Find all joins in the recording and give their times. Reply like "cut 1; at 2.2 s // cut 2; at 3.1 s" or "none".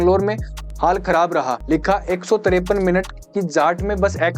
cut 1; at 1.6 s